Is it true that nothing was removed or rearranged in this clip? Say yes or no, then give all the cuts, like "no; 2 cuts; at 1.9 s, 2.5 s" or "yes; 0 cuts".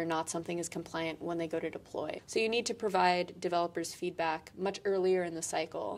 no; 1 cut; at 2.2 s